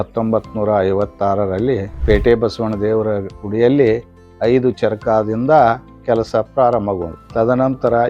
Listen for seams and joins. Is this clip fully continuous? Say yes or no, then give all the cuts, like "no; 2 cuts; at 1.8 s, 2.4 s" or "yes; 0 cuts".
no; 2 cuts; at 1.9 s, 7.2 s